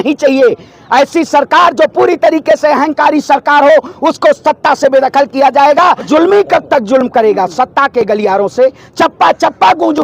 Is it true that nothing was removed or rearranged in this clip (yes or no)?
no